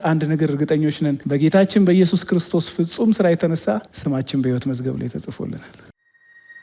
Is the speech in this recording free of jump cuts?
no; 2 cuts; at 1.2 s, 3.9 s

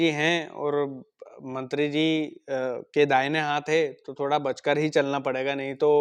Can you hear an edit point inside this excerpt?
no; 0 cuts

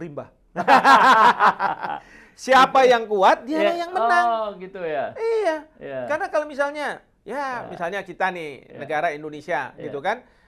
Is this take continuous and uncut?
yes; 0 cuts

